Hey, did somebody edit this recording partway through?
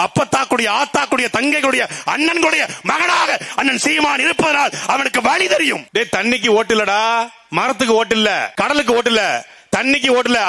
yes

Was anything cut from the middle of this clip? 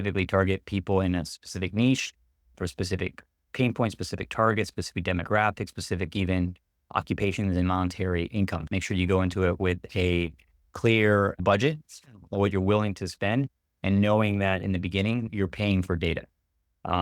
yes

